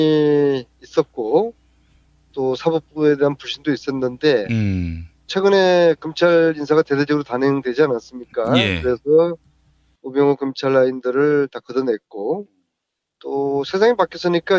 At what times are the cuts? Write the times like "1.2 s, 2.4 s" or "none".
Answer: none